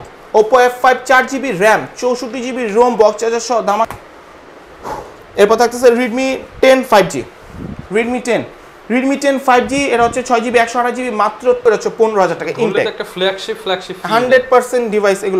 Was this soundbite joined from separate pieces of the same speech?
yes; 2 cuts; at 3.9 s, 11.6 s

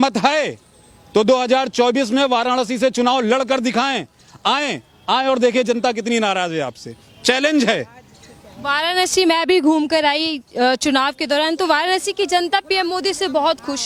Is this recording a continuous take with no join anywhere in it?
yes; 0 cuts

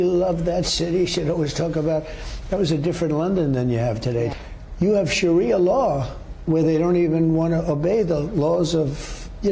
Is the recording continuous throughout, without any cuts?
no; 1 cut; at 4.3 s

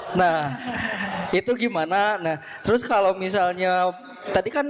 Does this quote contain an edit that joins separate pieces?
no; 0 cuts

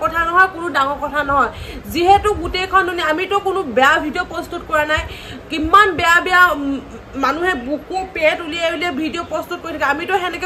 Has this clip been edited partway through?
no; 0 cuts

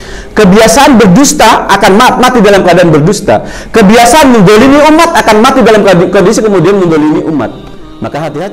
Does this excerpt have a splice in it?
no; 0 cuts

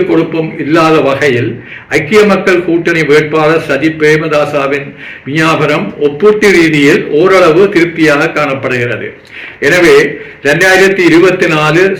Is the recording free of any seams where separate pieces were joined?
yes; 0 cuts

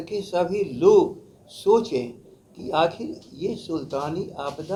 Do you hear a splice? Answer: no; 0 cuts

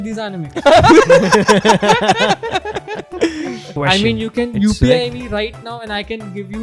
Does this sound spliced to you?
yes; 1 cut; at 3.7 s

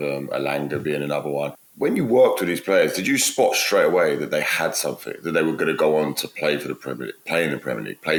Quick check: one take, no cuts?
yes; 0 cuts

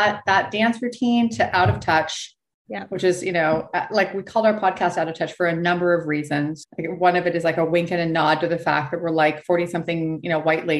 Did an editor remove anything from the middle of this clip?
yes; 1 cut; at 6.6 s

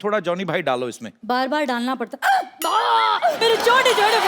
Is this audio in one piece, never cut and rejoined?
no; 2 cuts; at 1.1 s, 3.4 s

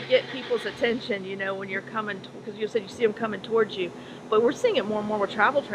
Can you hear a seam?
no; 0 cuts

